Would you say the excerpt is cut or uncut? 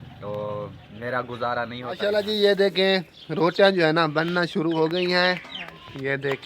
cut